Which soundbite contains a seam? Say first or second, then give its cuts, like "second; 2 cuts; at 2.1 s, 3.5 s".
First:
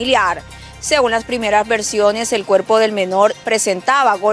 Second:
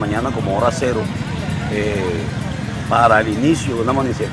first; 1 cut; at 3.4 s